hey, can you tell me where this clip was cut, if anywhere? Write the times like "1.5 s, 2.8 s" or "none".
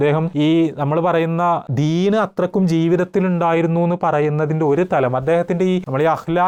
none